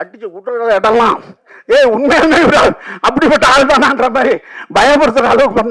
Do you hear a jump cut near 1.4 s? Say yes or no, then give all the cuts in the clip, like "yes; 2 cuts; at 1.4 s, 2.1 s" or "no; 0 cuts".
no; 0 cuts